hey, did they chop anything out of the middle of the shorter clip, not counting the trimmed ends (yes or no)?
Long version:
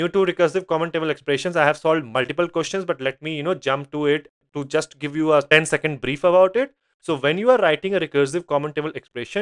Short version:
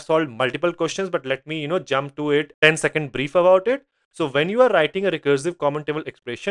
yes